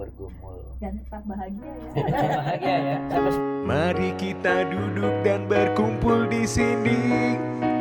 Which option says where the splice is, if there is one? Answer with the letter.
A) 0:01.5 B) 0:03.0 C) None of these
B